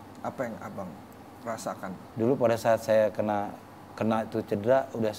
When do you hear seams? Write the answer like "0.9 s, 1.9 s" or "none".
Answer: 2.1 s